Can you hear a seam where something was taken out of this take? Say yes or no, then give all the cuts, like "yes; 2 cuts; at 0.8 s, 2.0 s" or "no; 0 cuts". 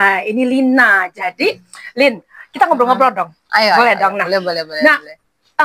no; 0 cuts